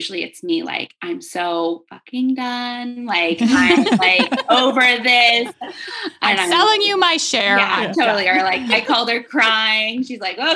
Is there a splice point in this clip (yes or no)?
yes